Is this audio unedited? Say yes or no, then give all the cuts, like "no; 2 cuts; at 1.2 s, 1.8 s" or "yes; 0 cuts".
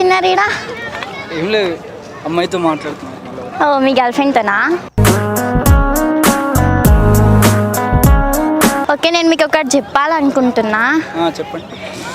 yes; 0 cuts